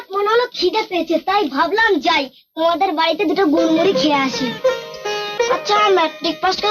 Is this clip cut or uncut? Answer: cut